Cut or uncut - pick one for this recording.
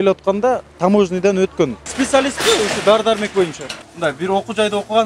cut